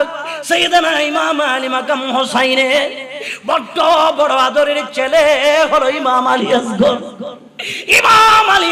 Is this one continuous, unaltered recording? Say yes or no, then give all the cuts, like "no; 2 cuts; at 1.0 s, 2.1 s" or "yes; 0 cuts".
yes; 0 cuts